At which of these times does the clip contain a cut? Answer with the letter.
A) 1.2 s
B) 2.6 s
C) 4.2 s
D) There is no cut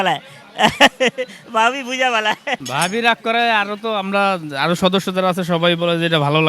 B